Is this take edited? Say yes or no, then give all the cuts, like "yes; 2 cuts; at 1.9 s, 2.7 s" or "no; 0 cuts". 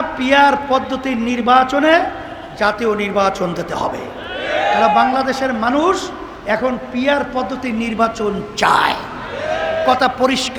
no; 0 cuts